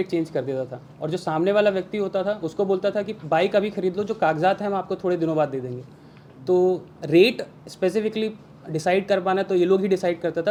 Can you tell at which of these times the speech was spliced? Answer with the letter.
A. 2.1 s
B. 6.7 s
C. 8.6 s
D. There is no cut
D